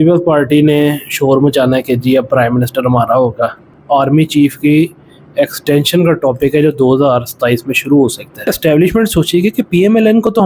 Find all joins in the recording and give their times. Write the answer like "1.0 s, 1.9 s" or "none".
3.7 s, 8.5 s